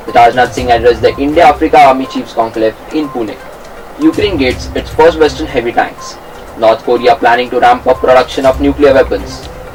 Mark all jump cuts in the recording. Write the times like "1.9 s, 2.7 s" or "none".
none